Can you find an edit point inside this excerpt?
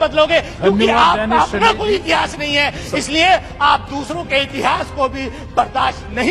no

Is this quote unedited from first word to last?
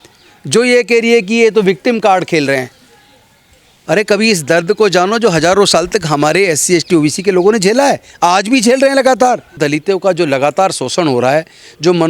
no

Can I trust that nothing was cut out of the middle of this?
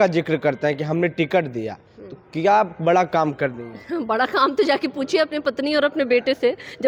yes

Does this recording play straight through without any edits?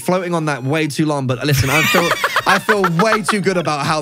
yes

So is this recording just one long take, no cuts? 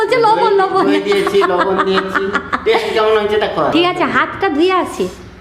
no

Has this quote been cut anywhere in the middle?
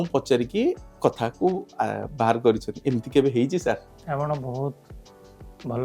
yes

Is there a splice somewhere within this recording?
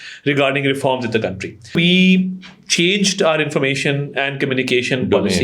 yes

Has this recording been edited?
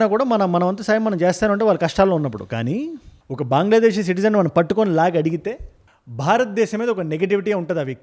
no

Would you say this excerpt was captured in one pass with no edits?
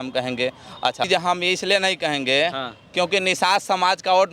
no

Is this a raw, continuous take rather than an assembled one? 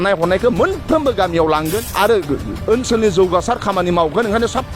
no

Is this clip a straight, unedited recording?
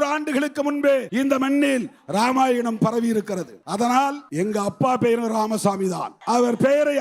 no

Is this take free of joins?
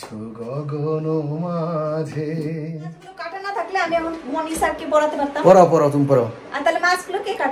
no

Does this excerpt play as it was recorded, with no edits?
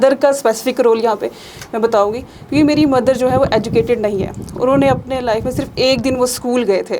yes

